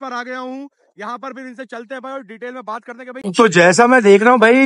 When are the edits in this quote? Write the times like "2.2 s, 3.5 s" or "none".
3.1 s